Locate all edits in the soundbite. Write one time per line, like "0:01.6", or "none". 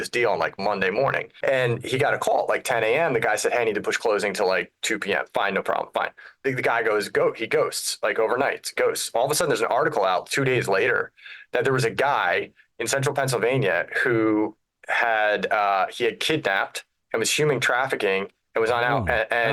0:01.3
0:06.2